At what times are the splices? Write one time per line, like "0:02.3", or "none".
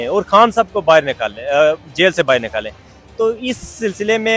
none